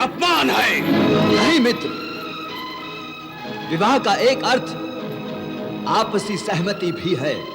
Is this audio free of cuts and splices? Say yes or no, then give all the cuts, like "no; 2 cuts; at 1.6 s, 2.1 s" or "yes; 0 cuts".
no; 1 cut; at 1.0 s